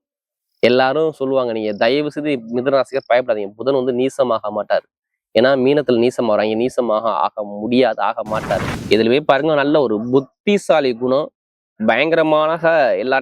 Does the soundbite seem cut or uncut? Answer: cut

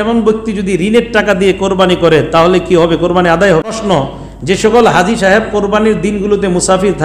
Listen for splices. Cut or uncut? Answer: cut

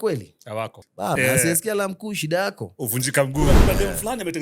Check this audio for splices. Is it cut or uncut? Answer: cut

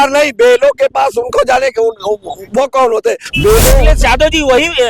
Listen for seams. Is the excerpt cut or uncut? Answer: cut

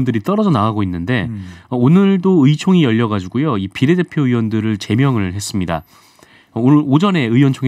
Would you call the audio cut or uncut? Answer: uncut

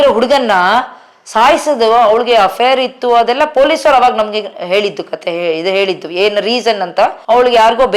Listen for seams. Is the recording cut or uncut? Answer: uncut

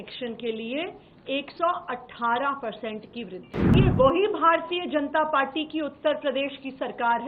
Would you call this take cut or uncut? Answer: cut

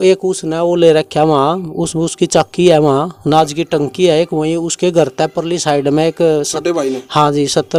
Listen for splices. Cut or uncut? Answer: uncut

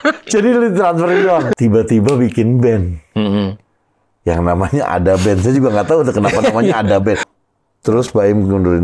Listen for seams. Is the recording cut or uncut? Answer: cut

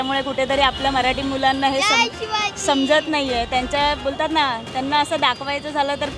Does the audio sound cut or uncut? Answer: uncut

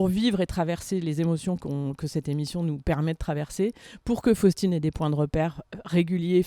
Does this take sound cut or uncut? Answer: uncut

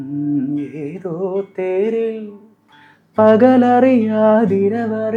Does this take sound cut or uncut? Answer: uncut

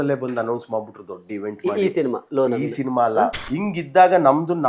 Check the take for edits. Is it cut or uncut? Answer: cut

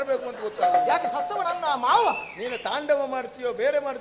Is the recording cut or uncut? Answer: uncut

